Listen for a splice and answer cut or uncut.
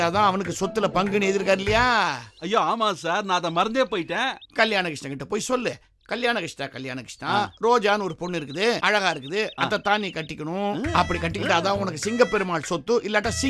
uncut